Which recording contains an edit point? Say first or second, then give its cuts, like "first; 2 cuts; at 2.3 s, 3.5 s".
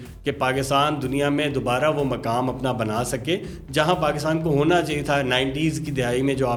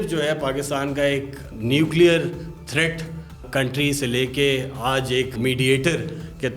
second; 3 cuts; at 1.5 s, 3.5 s, 5.3 s